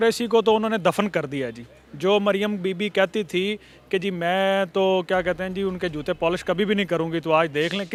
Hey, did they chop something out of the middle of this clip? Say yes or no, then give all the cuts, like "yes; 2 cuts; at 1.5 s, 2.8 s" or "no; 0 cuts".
no; 0 cuts